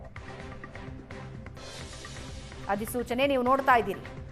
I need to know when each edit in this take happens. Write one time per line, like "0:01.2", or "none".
none